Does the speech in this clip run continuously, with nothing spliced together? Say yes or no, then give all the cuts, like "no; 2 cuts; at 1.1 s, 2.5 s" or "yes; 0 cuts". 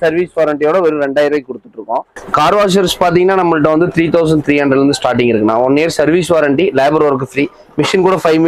no; 1 cut; at 2.2 s